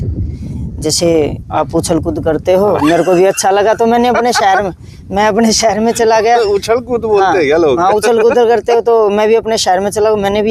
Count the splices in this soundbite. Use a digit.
0